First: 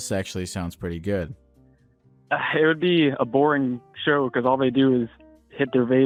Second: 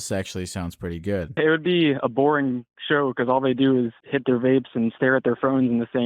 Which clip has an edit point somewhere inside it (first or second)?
second